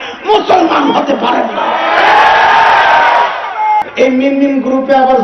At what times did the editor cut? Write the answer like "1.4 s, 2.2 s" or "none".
3.8 s